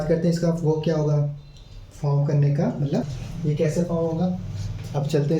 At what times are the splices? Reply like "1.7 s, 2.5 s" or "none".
3.2 s